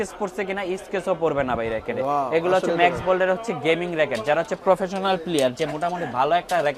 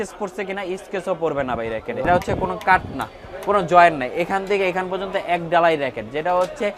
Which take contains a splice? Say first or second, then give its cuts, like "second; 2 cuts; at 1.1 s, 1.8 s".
second; 1 cut; at 2.1 s